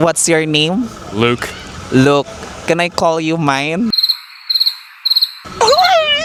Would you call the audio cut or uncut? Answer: uncut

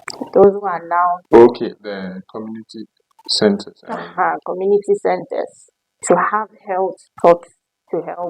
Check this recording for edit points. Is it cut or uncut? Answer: cut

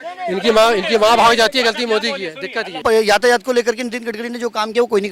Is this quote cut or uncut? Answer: cut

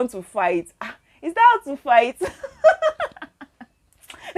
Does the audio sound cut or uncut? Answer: uncut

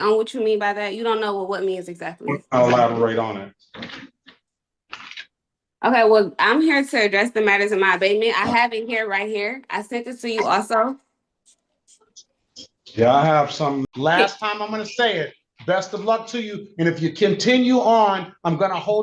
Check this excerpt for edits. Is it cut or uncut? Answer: cut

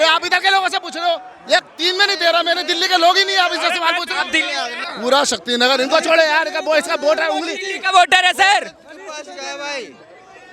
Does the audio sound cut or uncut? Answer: cut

